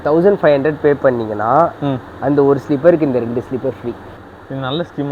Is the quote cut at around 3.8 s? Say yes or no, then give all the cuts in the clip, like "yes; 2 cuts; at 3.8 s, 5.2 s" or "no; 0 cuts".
no; 0 cuts